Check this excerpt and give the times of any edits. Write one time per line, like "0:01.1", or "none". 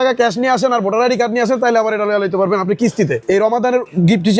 0:03.2